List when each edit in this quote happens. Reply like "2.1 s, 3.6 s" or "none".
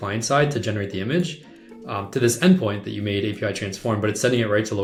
none